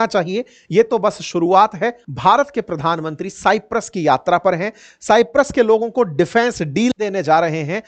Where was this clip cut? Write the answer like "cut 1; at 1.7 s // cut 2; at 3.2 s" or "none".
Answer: cut 1; at 2.0 s